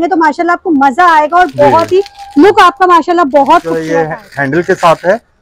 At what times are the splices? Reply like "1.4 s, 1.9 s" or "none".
3.8 s

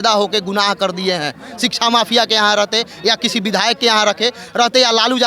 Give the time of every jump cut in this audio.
none

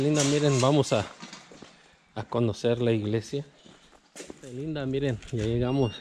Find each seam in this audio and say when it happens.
4.6 s

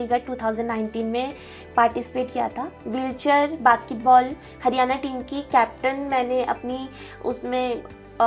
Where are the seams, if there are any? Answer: none

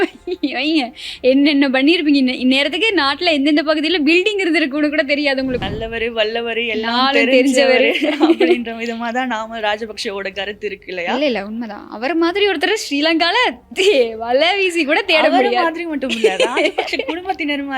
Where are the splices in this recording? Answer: 5.6 s

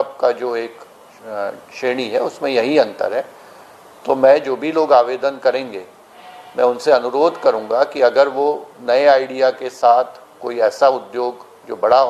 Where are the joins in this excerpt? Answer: none

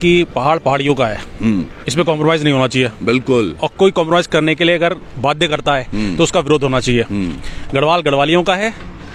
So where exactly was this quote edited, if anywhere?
none

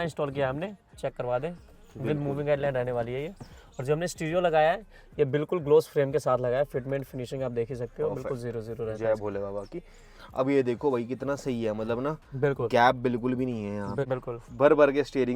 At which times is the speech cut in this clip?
0.9 s, 14.0 s

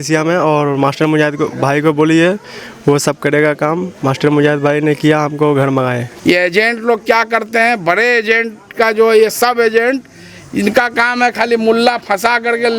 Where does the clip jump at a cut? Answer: 6.1 s

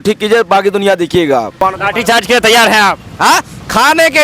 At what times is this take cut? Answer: 1.6 s

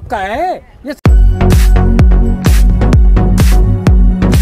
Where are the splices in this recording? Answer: 1.0 s

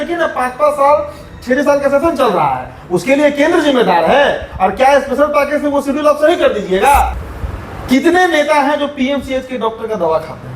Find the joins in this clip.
7.2 s

